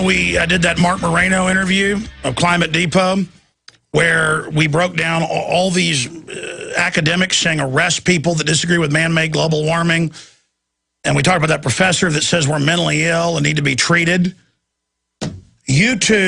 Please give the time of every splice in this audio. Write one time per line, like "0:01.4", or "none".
0:11.2